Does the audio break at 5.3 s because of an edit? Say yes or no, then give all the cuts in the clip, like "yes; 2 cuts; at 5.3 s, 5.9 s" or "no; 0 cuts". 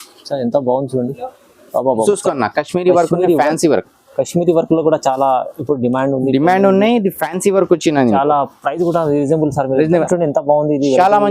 no; 2 cuts; at 2.0 s, 10.0 s